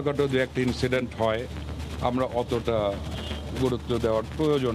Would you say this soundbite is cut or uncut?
uncut